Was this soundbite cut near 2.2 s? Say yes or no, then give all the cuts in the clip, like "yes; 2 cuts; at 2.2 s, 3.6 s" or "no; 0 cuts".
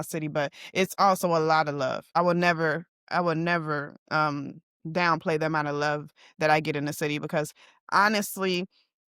yes; 1 cut; at 2.2 s